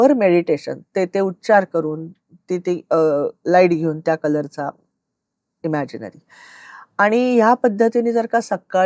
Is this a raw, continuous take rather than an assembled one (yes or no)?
yes